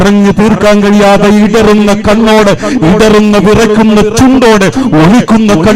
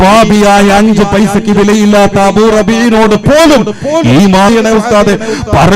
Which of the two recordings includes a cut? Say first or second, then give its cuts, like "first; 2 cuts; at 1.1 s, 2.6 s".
second; 1 cut; at 4.5 s